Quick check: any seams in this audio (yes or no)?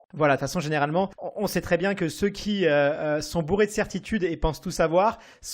yes